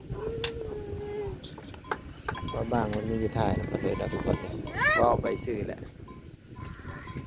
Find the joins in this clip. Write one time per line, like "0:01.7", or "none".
none